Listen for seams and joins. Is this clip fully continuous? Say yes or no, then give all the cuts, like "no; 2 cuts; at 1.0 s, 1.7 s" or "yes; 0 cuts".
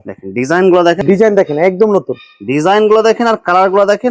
no; 1 cut; at 1.0 s